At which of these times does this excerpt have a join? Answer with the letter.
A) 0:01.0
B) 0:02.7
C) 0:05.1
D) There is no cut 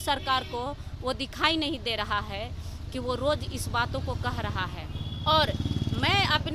C